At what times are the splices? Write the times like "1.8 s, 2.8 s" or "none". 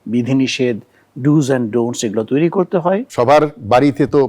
3.1 s